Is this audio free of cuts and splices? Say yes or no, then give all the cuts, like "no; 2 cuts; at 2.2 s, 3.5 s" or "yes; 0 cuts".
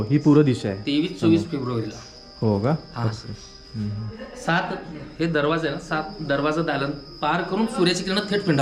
yes; 0 cuts